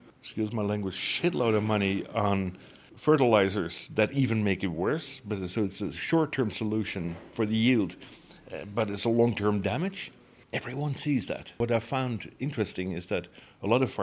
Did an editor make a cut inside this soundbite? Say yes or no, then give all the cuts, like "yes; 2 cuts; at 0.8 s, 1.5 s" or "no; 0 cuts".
yes; 1 cut; at 11.5 s